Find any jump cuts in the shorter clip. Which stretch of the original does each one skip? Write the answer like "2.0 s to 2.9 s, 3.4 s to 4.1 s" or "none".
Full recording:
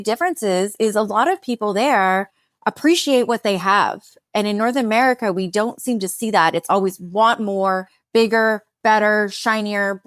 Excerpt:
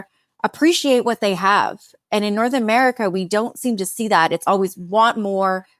none